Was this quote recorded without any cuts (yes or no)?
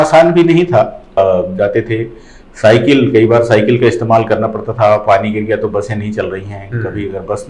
no